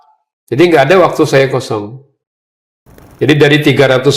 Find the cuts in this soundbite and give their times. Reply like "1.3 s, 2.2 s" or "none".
3.0 s